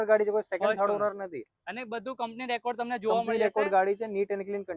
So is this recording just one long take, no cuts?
yes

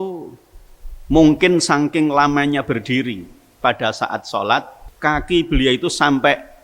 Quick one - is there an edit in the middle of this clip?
yes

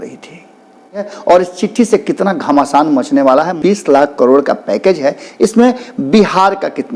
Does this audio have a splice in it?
yes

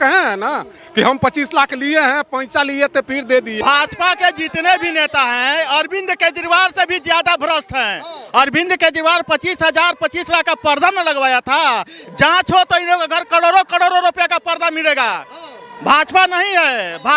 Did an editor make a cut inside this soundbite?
yes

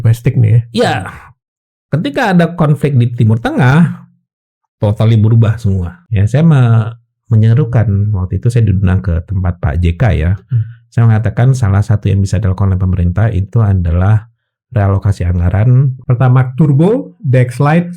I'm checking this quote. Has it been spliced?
yes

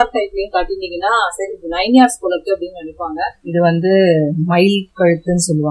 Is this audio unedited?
no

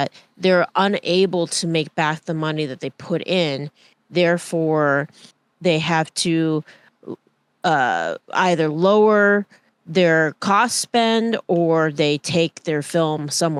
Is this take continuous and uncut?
yes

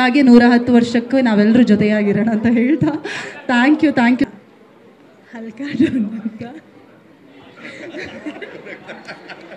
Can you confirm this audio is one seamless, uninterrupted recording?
no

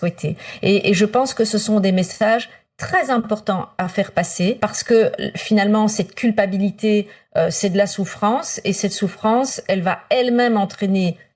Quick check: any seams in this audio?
yes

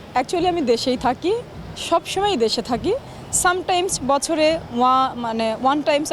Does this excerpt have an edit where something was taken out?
no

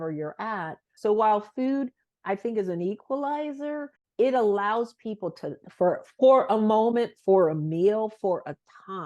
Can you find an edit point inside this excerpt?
yes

